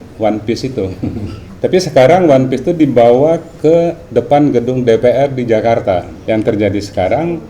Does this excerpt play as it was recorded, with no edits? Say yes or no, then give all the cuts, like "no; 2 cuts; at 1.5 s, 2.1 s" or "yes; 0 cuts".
no; 2 cuts; at 1.4 s, 6.1 s